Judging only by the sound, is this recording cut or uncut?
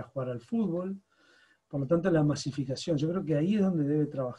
uncut